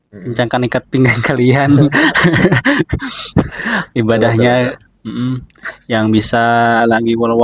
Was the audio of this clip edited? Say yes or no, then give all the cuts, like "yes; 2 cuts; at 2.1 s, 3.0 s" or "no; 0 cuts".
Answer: no; 0 cuts